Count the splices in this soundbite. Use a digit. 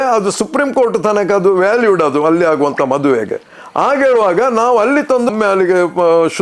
0